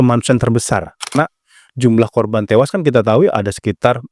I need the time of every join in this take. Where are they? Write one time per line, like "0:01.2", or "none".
0:01.1